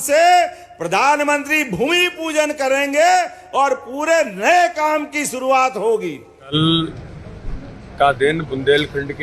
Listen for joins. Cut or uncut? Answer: cut